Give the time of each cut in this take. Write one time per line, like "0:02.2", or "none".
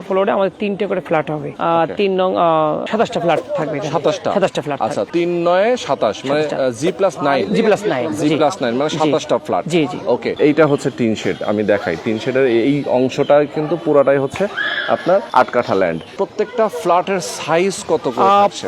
0:01.5
0:02.9
0:05.1
0:10.3
0:15.3
0:16.1